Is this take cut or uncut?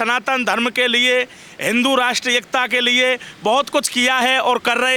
uncut